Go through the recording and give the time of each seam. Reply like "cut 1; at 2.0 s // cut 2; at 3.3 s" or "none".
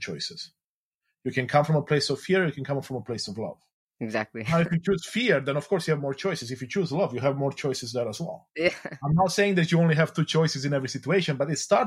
none